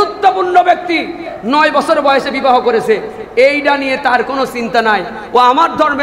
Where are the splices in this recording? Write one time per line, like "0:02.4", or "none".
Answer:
0:01.3